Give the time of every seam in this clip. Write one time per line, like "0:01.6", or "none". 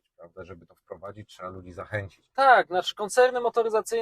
0:02.2